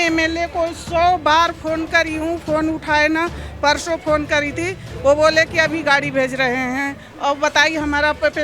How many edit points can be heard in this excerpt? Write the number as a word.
zero